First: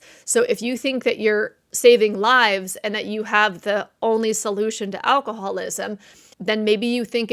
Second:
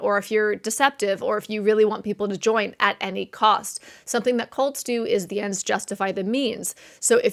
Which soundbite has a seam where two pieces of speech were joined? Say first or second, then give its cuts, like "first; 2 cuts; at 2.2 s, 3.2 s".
first; 1 cut; at 6.3 s